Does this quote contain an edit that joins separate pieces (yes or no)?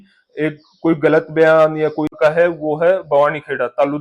yes